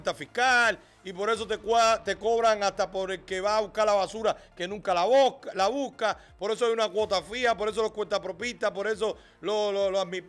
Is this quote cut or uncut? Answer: uncut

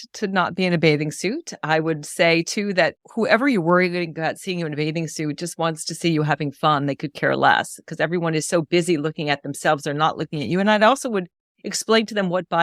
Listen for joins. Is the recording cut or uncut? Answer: uncut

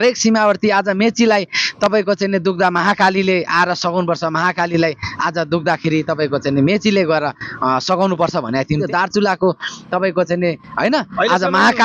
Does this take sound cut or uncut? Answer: cut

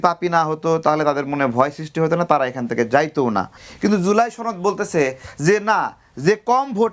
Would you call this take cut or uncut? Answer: cut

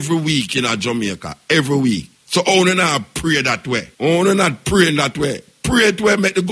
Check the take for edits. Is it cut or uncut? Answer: cut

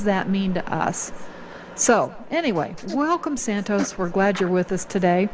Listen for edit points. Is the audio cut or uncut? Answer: cut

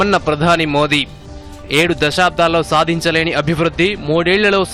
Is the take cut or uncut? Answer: uncut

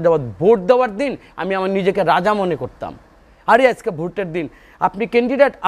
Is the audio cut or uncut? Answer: uncut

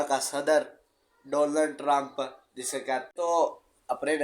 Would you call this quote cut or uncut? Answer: cut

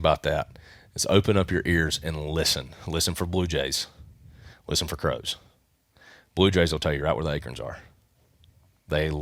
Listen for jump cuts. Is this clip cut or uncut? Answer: uncut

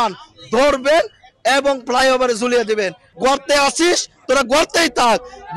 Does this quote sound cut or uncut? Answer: cut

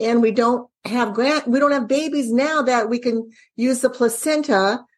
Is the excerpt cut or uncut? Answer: uncut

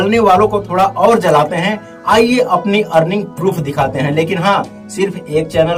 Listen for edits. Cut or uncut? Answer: uncut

